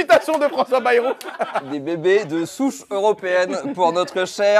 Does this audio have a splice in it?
yes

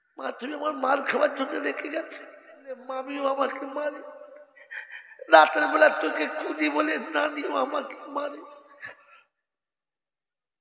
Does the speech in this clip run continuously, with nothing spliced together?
no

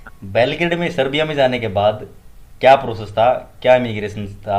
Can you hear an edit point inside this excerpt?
no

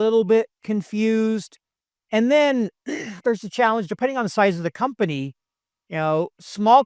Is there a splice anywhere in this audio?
no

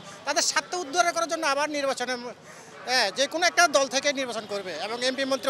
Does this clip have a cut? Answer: no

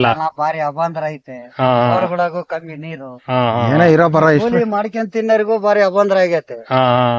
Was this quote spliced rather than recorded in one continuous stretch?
no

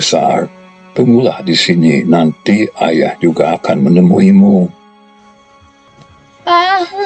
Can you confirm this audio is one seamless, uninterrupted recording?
no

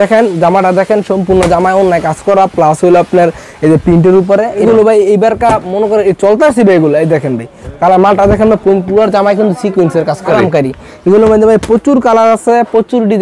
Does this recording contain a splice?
yes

